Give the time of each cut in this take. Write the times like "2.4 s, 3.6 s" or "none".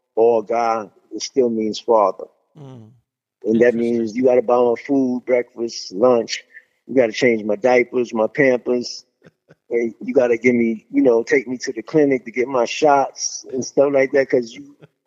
none